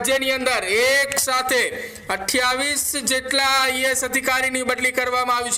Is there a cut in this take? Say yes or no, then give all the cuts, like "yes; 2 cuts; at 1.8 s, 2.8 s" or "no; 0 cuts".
no; 0 cuts